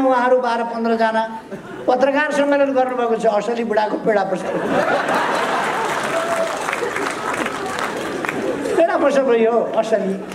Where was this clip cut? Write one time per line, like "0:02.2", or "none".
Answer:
none